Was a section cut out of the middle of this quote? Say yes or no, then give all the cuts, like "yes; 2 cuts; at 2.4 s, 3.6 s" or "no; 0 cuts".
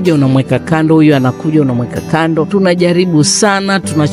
yes; 1 cut; at 2.5 s